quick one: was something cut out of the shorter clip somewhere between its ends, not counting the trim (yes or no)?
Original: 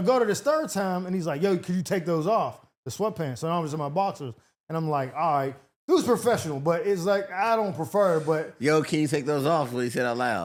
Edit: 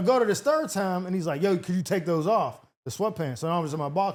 no